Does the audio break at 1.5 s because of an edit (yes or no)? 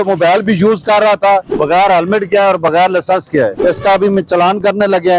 yes